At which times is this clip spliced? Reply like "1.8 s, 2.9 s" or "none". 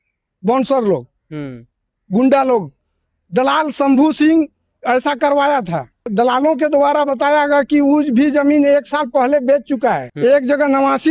6.0 s, 10.1 s